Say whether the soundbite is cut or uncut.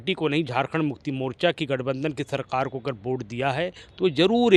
uncut